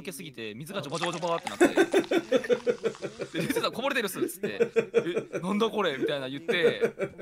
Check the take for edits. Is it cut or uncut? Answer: uncut